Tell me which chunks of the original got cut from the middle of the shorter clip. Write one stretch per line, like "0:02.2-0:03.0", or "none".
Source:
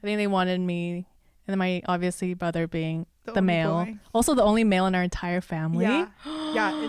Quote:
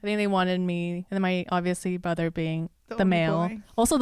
0:01.0-0:01.4

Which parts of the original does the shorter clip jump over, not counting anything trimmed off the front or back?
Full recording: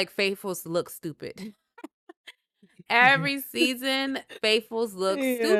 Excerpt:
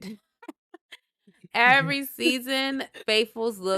none

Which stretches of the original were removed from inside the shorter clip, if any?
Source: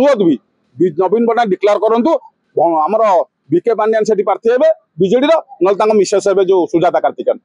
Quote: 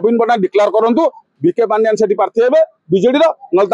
0:02.4-0:03.4

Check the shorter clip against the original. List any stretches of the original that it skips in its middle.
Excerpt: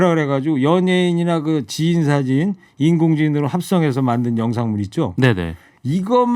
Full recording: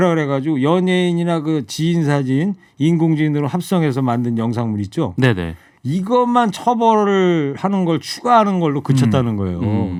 none

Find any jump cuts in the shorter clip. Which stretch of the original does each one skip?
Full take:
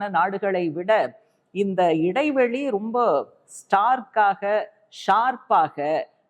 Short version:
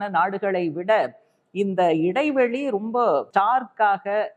0:03.3-0:03.6

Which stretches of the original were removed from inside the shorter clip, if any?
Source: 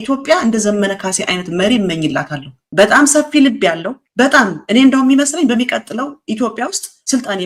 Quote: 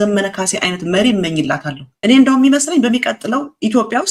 0:02.6-0:04.6

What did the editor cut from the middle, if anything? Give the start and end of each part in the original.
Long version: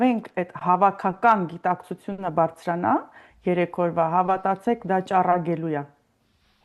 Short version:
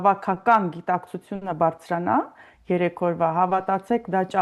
none

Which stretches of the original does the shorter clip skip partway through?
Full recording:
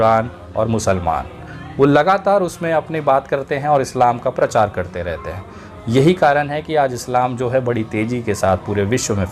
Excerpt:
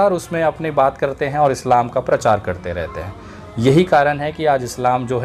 none

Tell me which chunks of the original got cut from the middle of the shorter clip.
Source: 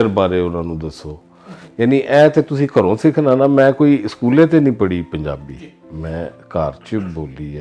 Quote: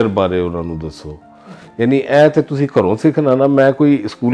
none

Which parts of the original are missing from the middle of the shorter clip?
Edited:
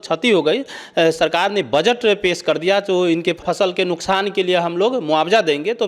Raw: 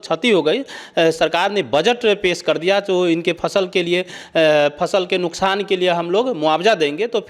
0:03.4-0:04.7

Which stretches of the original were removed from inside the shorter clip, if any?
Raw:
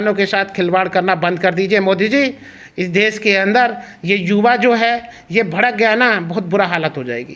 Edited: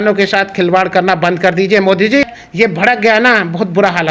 0:02.4-0:05.2

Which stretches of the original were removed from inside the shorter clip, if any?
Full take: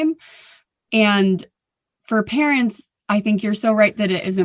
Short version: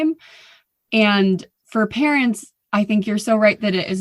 0:01.6-0:01.9

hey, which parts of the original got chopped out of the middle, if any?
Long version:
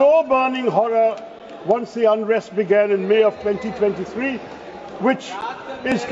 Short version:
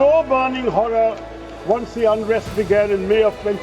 none

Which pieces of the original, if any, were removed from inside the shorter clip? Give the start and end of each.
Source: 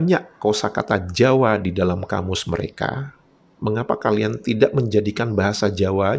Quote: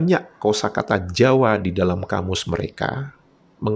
none

